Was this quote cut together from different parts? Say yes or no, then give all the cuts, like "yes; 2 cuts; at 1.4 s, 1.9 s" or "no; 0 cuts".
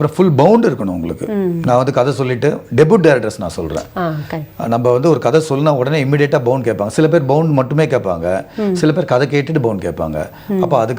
no; 0 cuts